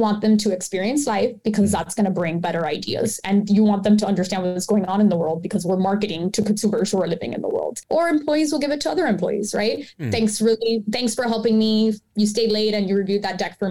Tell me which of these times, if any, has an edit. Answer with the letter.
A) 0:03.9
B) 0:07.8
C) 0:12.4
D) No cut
B